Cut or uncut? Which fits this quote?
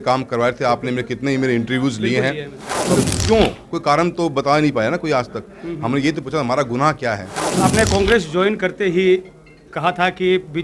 cut